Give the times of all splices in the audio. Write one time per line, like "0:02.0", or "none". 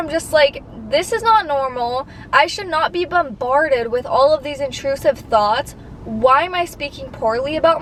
none